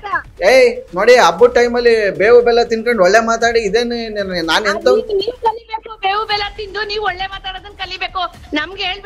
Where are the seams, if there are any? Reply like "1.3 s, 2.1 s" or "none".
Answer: none